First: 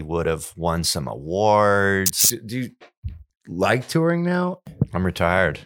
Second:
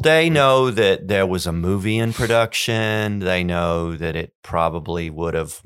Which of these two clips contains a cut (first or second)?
first